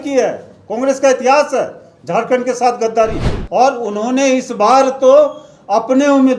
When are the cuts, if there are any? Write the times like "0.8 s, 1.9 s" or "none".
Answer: none